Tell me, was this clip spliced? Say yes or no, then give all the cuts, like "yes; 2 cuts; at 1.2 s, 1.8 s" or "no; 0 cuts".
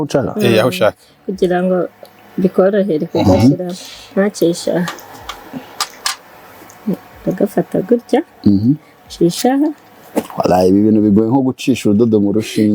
no; 0 cuts